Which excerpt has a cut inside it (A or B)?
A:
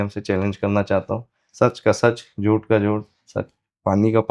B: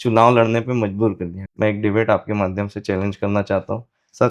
B